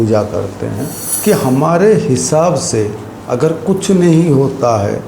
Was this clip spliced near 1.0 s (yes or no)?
yes